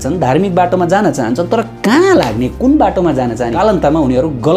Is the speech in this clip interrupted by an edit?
yes; 1 cut; at 3.5 s

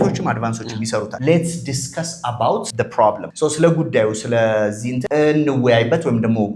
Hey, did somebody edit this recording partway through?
yes; 3 cuts; at 1.1 s, 2.9 s, 4.9 s

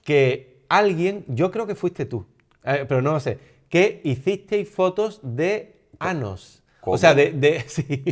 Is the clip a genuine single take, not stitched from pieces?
yes; 0 cuts

